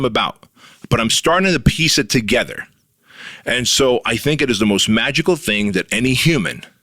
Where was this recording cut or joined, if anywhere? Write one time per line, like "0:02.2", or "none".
none